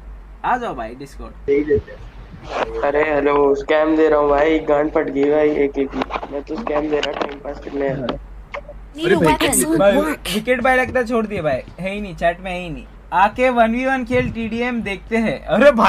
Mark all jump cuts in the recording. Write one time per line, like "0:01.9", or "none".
0:02.5
0:09.0